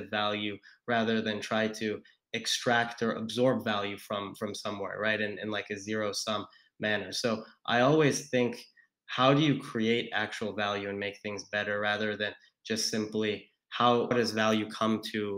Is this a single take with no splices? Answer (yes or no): no